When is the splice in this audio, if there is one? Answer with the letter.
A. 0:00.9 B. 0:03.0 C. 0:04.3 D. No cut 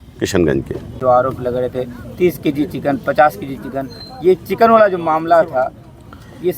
A